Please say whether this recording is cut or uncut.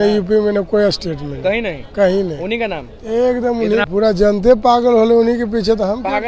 cut